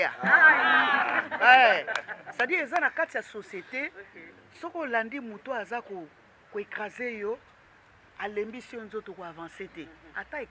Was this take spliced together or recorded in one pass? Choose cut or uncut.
uncut